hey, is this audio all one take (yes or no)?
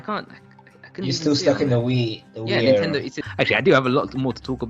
no